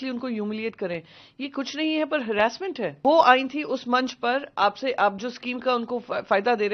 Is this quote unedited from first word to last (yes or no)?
no